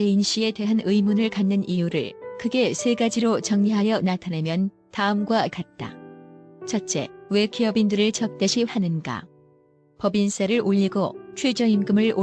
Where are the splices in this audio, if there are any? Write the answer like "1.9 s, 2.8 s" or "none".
10.3 s